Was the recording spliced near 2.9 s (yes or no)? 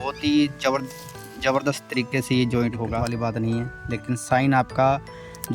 yes